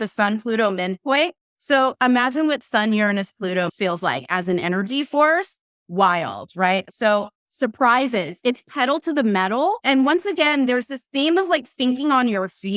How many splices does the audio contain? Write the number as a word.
four